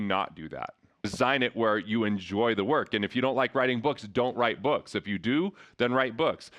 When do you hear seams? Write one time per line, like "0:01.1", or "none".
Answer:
0:01.1